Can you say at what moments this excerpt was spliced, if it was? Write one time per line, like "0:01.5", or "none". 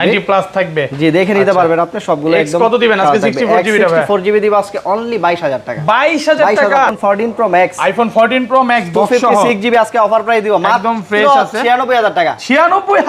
0:06.9